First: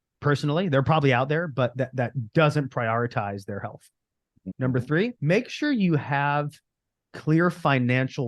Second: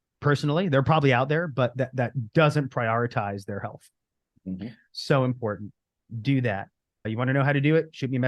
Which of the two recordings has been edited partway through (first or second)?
first